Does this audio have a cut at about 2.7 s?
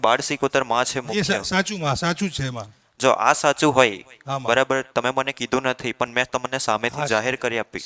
no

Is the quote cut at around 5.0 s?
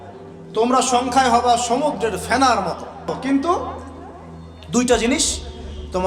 no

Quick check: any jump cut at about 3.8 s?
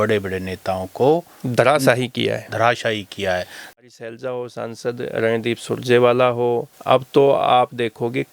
yes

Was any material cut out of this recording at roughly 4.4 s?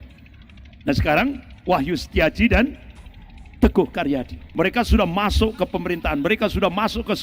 yes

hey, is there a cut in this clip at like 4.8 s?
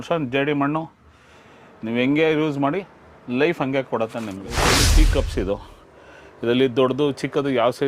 yes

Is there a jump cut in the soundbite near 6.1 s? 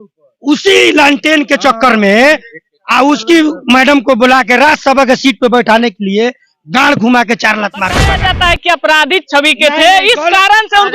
no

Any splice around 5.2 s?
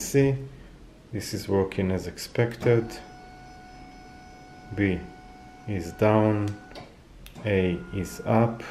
no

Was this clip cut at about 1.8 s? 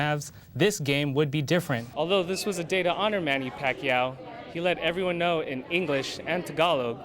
yes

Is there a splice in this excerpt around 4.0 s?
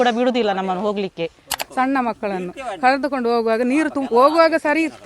no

